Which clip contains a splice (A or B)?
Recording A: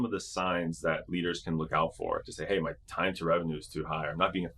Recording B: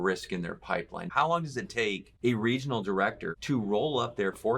B